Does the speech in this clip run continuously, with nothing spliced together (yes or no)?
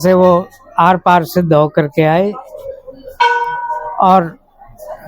yes